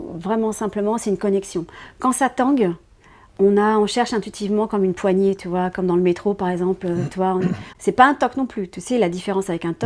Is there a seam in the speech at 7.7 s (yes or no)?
yes